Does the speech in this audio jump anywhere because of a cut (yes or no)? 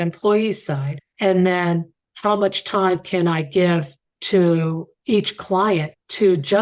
no